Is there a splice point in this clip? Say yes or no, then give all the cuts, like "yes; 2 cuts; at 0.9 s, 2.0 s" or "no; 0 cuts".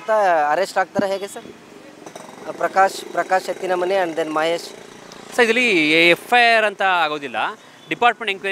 no; 0 cuts